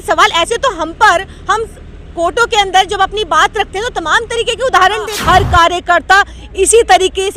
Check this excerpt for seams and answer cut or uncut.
cut